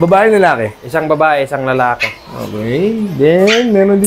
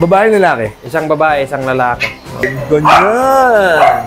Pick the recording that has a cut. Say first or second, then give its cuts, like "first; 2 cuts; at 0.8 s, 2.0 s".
second; 1 cut; at 2.4 s